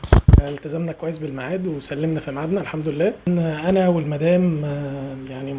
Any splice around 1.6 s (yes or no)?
no